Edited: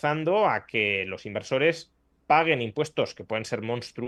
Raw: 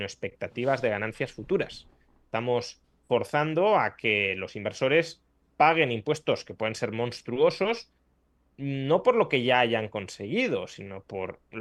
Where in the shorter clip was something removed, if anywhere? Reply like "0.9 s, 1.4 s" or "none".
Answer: none

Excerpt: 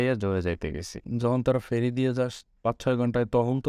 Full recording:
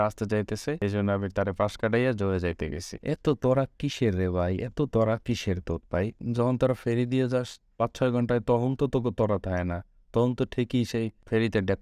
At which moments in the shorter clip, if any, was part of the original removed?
1.0 s

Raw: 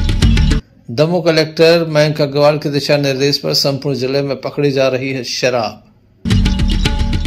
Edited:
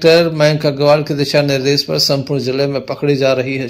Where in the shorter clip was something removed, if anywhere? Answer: none

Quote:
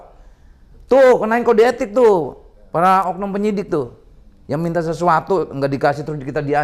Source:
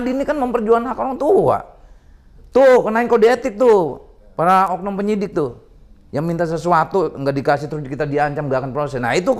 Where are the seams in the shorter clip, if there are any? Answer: none

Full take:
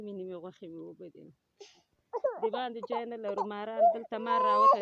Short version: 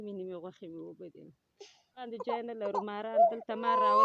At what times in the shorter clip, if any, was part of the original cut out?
2.1 s

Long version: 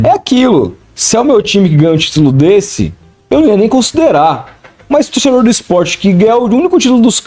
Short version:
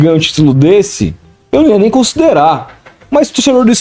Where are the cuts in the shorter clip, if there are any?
none

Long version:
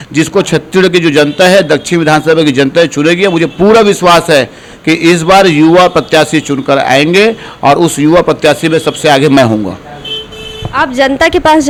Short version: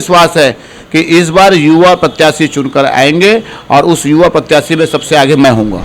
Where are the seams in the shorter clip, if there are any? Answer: none

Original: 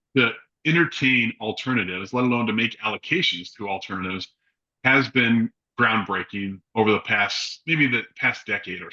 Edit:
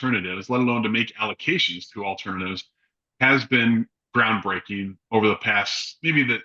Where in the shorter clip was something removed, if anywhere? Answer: none

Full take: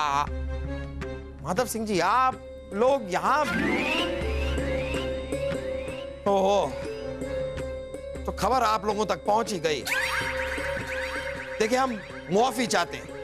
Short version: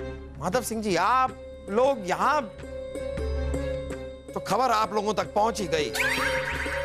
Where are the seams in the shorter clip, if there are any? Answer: 4.2 s

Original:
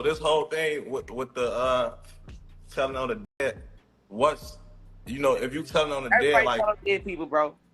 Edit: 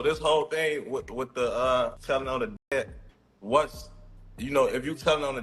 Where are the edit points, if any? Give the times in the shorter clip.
2.0 s

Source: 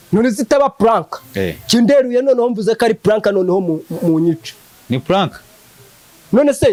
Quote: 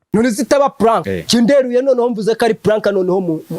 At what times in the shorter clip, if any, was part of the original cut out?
1.2 s

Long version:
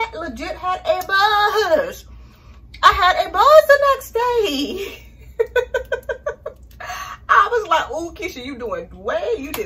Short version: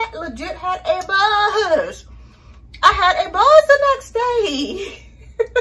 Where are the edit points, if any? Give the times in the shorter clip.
none

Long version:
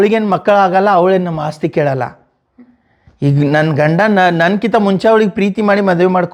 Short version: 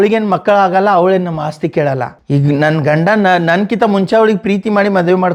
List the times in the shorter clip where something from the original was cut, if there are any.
2.1 s

